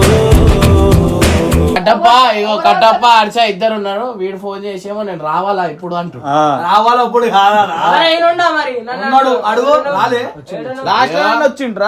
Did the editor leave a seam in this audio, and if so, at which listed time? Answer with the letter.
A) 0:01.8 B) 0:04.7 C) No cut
A